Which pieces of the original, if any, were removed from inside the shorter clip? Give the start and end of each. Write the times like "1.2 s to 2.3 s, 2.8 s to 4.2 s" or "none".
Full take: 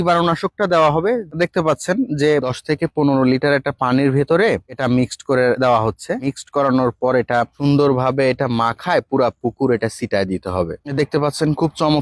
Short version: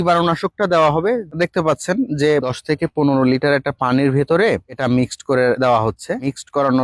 none